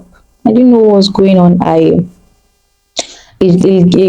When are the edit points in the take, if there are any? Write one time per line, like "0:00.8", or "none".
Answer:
none

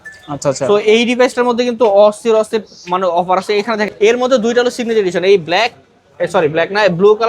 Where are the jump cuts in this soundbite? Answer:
0:03.9

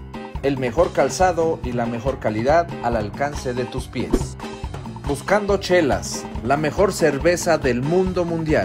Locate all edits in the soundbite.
0:04.9

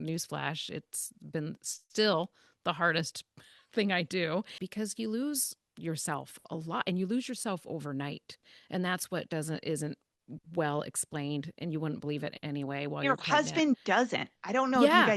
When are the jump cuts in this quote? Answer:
0:04.6

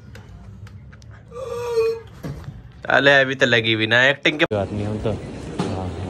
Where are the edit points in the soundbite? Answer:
0:04.5

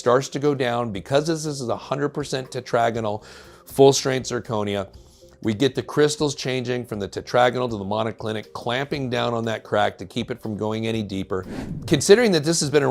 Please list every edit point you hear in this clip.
0:11.6

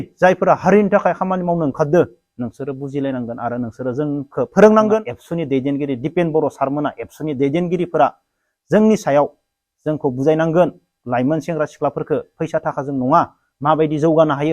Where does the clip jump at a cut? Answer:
0:05.2

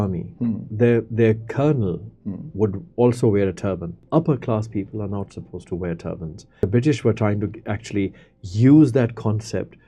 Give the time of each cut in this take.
0:04.0
0:06.6

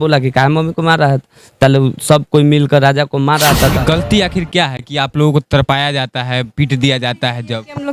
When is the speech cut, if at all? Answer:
0:03.8

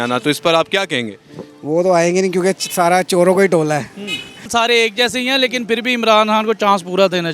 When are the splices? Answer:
0:04.5

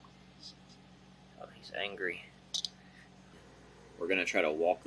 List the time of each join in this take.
0:03.4

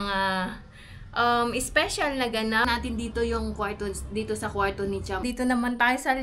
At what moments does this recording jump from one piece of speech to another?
0:02.6
0:05.2

